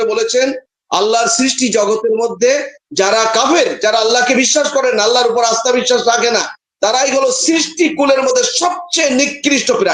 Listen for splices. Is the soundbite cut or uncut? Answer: uncut